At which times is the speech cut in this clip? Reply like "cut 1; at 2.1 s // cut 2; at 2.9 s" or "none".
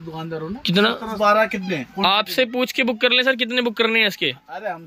cut 1; at 1.1 s